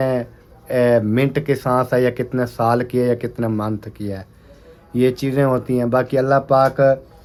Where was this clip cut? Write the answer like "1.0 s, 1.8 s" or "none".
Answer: none